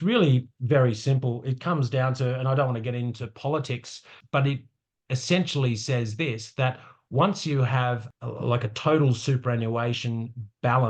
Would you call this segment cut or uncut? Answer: cut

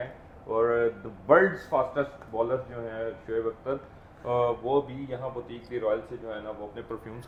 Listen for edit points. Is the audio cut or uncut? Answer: uncut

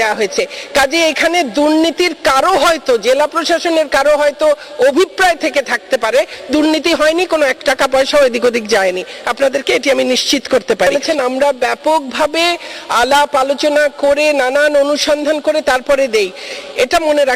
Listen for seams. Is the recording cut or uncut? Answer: cut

